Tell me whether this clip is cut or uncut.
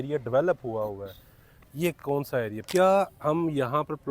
cut